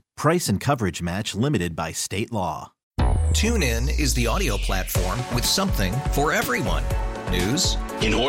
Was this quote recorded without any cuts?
no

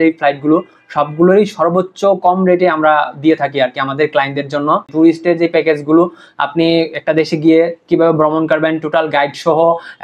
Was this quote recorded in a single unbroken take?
no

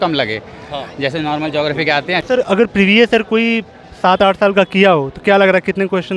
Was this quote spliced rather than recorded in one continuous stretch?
yes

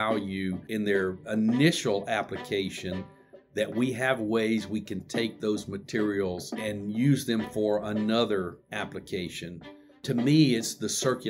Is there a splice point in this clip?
yes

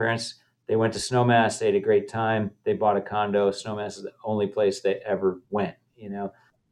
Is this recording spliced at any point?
no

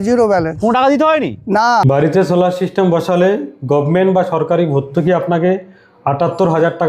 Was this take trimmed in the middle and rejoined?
yes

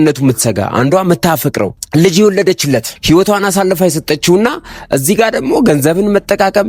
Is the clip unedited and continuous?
no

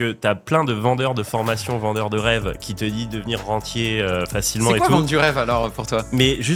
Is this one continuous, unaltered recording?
yes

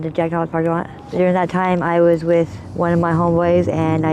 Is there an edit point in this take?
yes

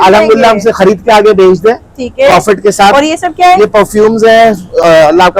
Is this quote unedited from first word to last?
yes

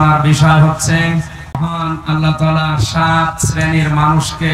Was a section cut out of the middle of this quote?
yes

